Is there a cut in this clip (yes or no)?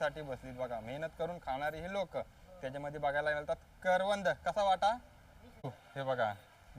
yes